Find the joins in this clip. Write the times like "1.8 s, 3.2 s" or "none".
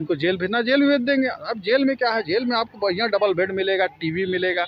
none